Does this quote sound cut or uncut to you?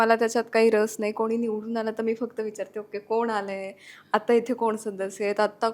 uncut